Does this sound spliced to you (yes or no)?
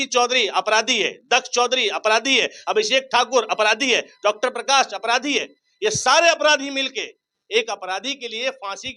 no